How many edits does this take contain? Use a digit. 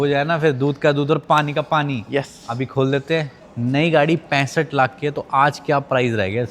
1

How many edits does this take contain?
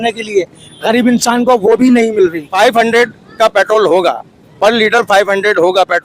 1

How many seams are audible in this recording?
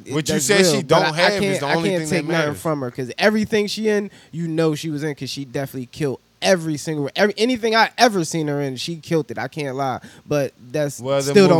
0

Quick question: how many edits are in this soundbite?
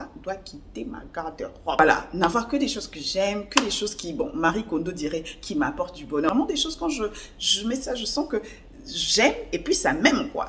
2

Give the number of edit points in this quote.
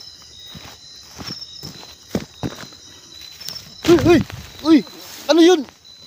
1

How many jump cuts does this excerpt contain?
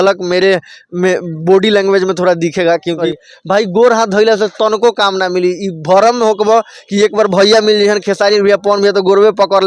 1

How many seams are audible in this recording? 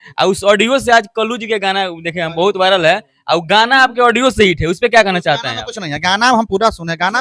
0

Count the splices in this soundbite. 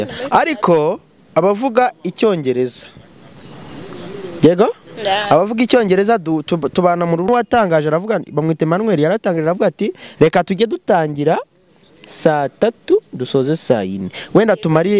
1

